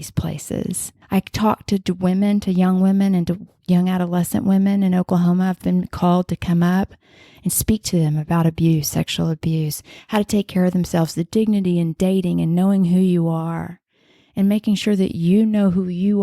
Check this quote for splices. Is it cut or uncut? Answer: cut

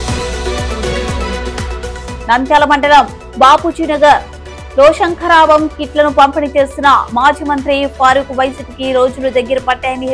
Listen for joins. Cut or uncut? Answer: uncut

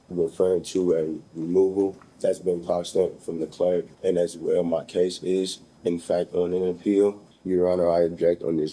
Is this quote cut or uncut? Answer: cut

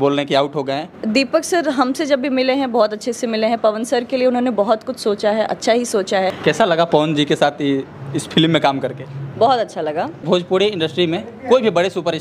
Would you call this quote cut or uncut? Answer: cut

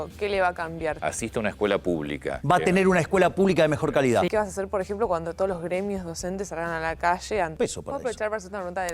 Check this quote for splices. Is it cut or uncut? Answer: cut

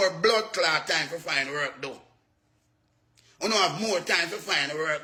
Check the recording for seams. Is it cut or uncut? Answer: uncut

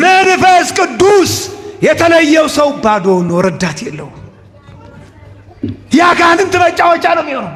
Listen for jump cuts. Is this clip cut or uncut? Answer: uncut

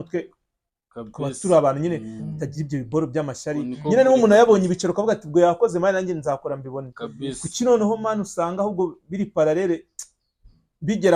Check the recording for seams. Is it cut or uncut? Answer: uncut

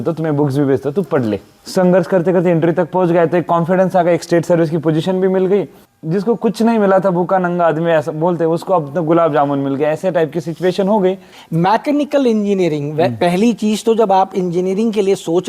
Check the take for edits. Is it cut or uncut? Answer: cut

